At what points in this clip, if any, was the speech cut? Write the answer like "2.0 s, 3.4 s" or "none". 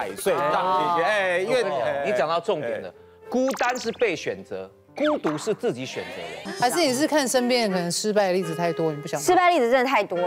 6.4 s